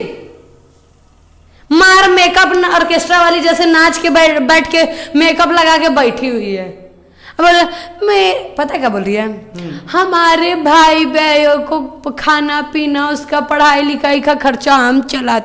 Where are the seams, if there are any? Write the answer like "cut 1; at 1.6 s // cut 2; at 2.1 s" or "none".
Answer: none